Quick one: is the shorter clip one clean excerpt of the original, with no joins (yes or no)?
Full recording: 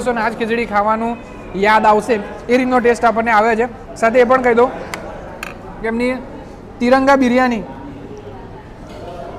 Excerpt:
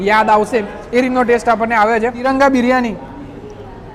no